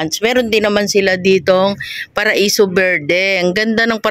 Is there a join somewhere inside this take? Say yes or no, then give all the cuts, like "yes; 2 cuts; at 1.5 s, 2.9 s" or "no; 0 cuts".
no; 0 cuts